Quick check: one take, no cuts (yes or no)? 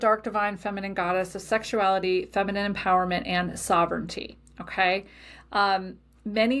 yes